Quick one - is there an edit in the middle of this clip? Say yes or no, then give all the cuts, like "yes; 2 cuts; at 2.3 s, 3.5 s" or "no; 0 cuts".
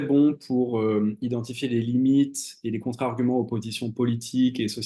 no; 0 cuts